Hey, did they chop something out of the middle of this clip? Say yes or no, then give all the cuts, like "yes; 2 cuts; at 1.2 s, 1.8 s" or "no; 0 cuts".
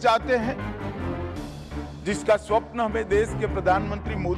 no; 0 cuts